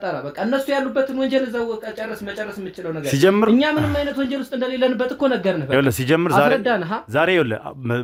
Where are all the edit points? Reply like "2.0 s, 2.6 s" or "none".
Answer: none